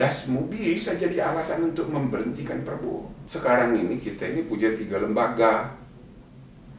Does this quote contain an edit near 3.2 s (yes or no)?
yes